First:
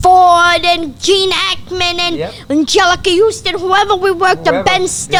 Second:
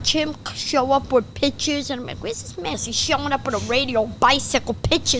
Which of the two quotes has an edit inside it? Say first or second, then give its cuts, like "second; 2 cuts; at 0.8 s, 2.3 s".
second; 1 cut; at 2.9 s